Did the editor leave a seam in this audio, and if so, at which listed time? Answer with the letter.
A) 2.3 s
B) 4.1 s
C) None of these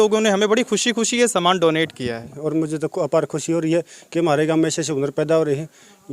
A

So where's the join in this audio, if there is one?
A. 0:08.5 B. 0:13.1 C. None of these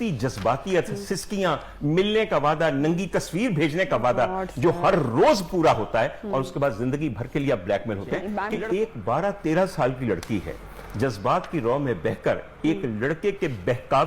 A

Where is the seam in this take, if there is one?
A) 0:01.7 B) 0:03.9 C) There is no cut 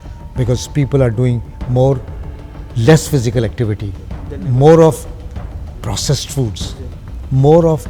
C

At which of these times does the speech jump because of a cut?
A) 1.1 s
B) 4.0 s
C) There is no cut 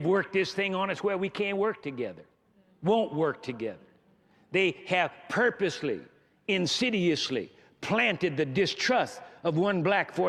C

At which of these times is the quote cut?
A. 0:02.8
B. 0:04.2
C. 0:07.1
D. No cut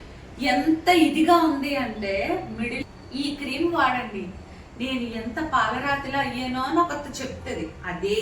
A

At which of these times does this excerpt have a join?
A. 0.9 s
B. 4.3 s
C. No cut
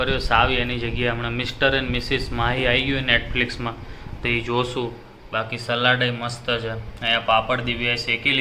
C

